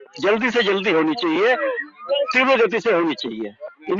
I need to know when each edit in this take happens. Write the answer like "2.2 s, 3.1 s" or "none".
none